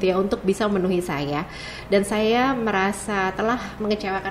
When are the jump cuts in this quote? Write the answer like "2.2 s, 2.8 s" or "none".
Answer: none